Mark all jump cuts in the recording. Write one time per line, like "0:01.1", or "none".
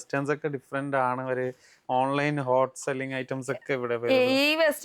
none